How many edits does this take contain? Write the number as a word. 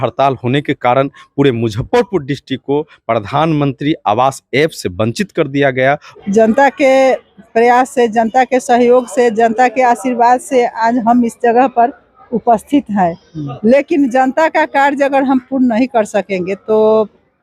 one